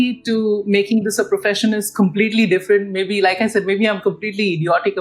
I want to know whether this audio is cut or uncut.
uncut